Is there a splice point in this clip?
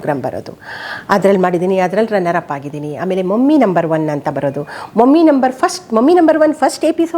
no; 0 cuts

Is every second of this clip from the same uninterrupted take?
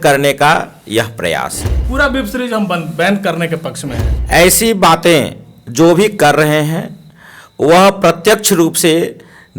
no; 2 cuts; at 1.8 s, 4.1 s

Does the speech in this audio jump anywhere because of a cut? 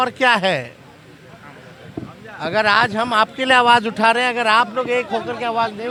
no; 0 cuts

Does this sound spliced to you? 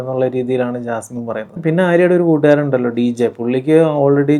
yes; 1 cut; at 1.5 s

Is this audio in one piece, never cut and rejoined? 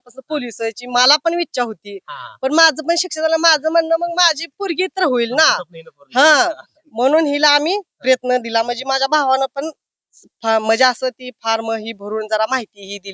yes; 0 cuts

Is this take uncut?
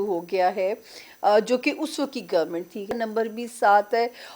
no; 1 cut; at 2.9 s

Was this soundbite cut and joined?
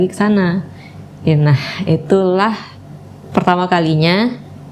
no; 0 cuts

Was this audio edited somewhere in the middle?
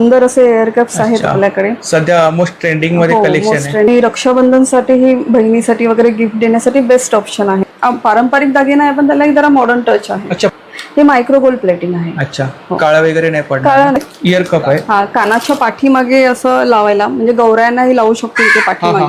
yes; 4 cuts; at 3.9 s, 7.7 s, 10.5 s, 14.0 s

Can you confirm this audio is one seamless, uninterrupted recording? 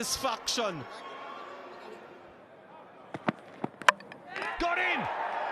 no; 1 cut; at 2.4 s

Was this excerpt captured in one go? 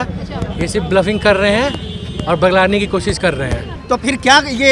no; 1 cut; at 3.7 s

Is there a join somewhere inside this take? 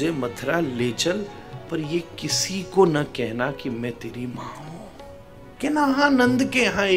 yes; 1 cut; at 5.5 s

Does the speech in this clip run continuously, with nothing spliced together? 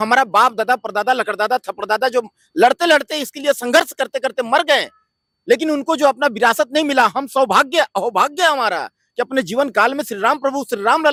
yes; 0 cuts

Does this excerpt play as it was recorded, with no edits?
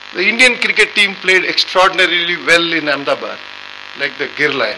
yes; 0 cuts

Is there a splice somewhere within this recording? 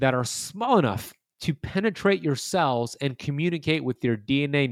no; 0 cuts

